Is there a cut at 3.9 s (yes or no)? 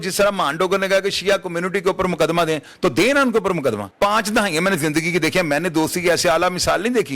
yes